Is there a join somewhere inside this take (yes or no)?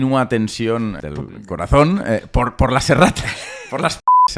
yes